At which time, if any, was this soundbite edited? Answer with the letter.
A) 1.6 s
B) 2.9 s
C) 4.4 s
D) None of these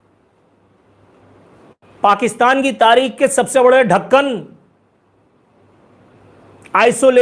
D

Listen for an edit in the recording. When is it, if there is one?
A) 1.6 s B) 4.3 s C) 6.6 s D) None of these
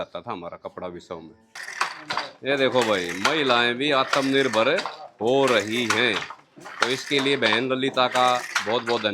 A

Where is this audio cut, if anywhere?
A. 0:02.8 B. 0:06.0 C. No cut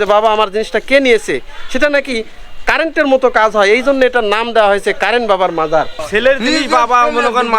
B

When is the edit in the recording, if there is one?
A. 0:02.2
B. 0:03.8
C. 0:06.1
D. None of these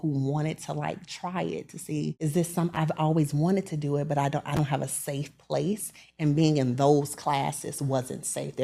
A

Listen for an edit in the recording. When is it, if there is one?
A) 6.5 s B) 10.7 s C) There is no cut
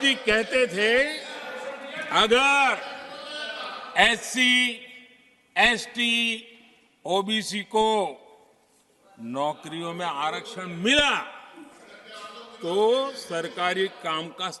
C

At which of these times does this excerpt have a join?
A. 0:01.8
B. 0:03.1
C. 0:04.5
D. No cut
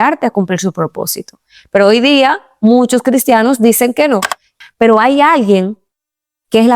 C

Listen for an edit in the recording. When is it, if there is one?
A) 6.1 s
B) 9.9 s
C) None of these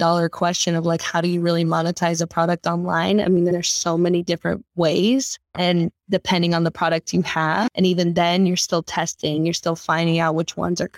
C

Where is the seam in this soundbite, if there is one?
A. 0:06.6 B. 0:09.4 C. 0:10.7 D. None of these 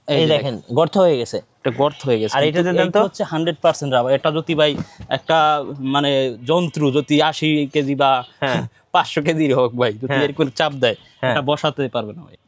D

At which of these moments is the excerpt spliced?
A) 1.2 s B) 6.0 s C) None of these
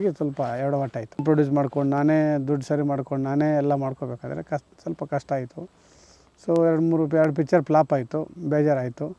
A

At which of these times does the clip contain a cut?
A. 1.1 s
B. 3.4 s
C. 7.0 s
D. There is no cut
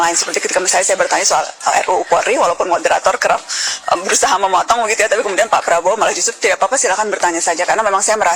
D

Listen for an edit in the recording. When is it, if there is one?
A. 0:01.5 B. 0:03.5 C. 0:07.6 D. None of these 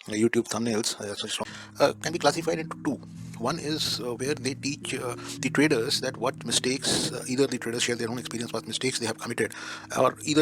A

